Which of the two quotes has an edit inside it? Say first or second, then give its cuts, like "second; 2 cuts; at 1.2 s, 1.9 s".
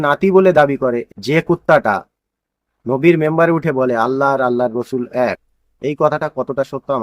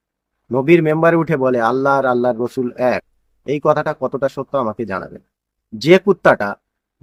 first; 1 cut; at 1.1 s